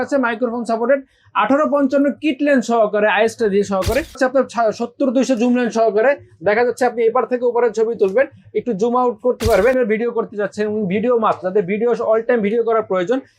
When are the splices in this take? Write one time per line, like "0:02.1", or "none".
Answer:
0:04.2
0:09.8